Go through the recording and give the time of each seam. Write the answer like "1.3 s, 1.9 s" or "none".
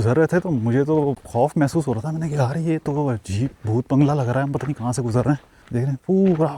1.2 s, 5.5 s

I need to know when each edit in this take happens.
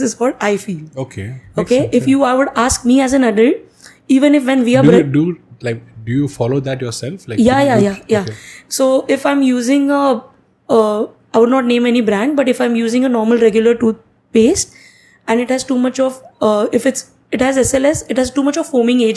none

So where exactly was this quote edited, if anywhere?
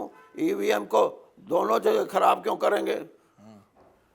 none

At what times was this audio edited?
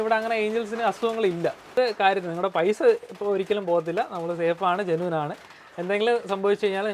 1.7 s

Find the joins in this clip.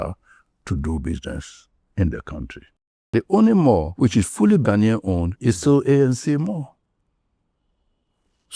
3.1 s

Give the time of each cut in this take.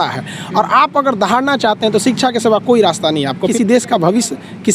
3.5 s

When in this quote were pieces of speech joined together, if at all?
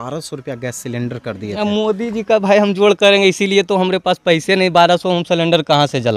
none

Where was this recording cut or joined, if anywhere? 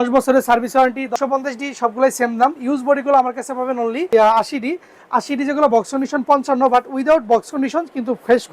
1.1 s, 4.1 s

